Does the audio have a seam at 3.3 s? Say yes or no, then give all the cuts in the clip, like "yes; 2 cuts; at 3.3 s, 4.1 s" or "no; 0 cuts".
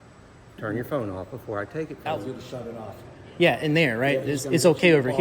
no; 1 cut; at 2.0 s